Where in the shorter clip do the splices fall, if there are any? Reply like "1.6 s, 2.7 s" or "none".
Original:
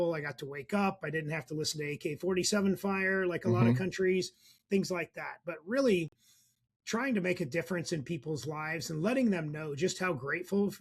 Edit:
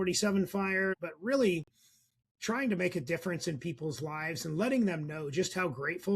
0.9 s